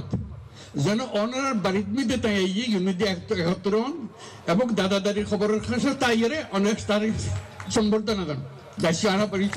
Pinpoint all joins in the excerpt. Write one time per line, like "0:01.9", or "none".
none